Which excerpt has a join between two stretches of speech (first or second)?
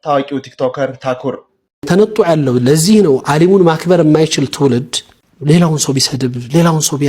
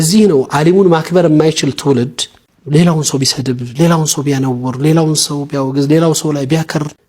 first